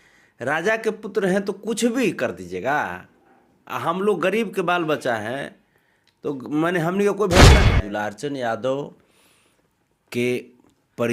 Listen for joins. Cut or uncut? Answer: cut